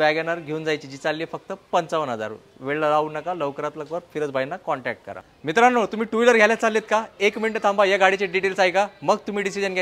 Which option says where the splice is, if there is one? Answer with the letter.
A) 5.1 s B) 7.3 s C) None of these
A